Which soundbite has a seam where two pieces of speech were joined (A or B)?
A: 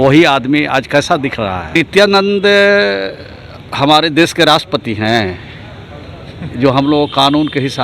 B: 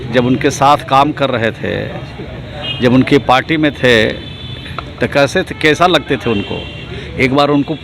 A